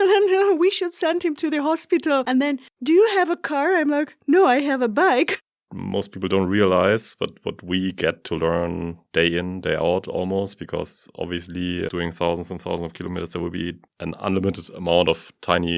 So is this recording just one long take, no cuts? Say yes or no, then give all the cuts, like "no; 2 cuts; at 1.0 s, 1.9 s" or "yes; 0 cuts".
no; 2 cuts; at 2.7 s, 5.5 s